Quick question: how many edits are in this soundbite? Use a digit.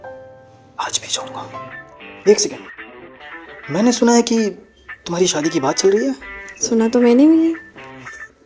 1